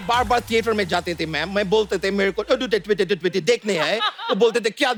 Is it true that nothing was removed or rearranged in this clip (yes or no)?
yes